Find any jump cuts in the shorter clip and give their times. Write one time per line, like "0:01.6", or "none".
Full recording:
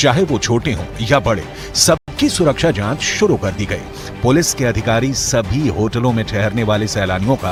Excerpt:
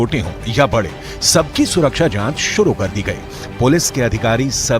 0:01.5